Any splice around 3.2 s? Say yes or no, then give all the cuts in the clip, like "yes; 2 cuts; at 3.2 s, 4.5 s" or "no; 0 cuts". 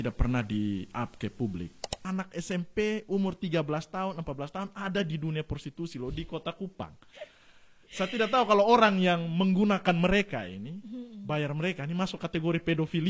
no; 1 cut; at 1.9 s